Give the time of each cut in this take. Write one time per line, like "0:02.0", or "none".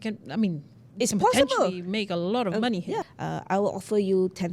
0:03.1